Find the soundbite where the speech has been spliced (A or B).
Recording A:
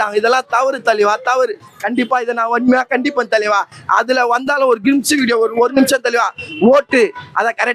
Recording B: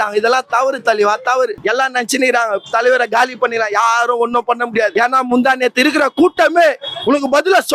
B